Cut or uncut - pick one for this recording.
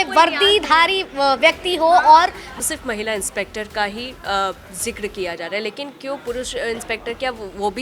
cut